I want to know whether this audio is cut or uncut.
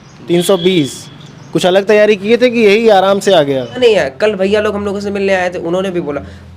cut